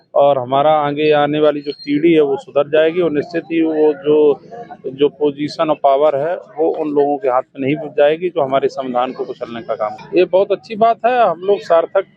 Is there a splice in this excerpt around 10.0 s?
yes; 1 cut; at 10.0 s

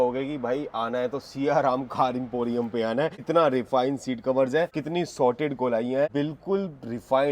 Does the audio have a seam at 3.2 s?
yes; 3 cuts; at 3.2 s, 4.8 s, 6.1 s

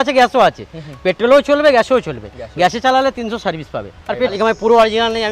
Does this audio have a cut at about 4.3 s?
yes; 1 cut; at 4.3 s

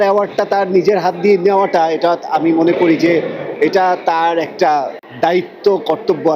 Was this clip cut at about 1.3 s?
no; 1 cut; at 5.0 s

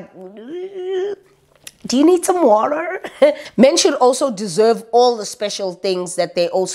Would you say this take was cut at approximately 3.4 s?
yes; 1 cut; at 3.4 s

